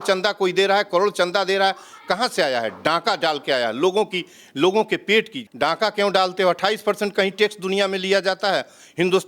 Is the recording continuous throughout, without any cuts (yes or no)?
no